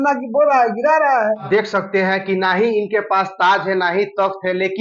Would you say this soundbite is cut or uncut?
uncut